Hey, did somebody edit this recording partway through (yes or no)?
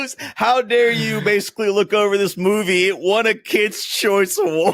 no